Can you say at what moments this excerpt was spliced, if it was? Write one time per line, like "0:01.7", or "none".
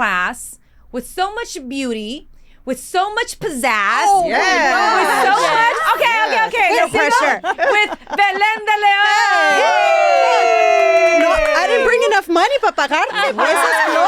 none